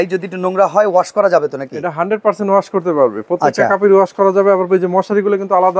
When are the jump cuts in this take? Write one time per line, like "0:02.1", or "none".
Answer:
none